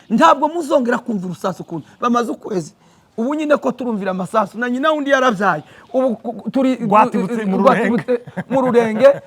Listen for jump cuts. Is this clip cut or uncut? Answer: uncut